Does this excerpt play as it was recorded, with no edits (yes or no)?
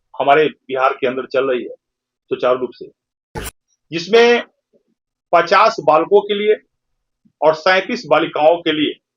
yes